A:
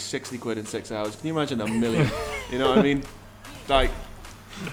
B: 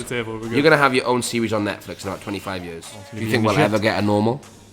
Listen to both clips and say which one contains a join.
B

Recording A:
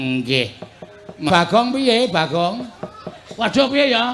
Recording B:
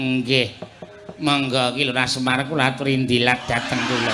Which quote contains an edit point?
A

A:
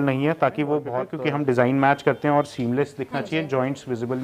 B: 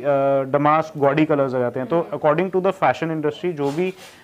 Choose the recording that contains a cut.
A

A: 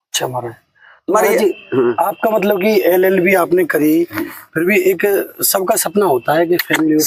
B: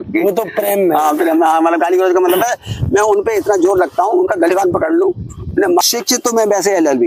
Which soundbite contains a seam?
B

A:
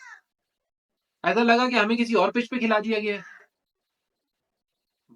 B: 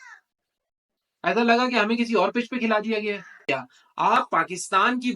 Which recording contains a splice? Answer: B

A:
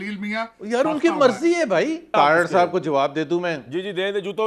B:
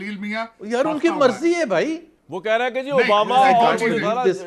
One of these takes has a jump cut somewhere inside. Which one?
A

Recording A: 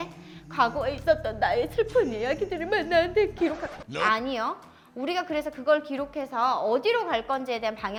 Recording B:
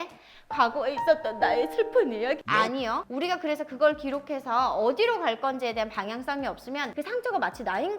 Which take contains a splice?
B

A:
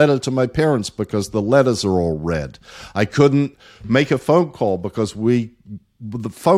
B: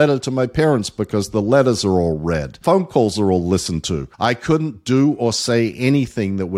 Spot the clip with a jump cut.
B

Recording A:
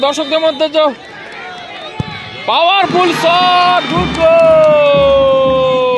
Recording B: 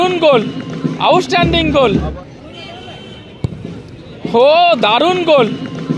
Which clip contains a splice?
B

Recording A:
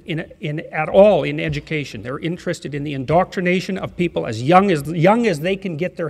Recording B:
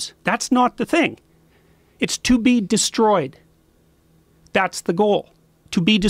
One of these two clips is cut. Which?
A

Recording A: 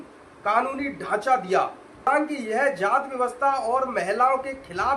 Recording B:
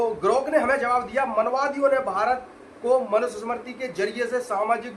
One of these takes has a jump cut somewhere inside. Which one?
A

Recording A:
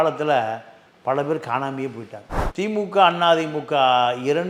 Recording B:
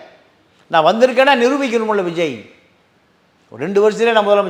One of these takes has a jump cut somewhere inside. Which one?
A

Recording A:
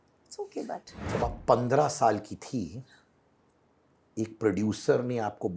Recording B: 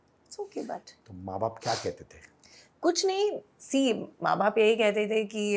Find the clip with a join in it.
A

